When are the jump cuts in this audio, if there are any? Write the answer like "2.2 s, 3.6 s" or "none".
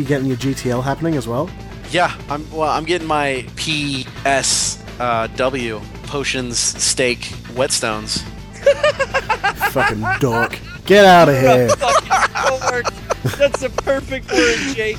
3.7 s, 5.9 s, 7.4 s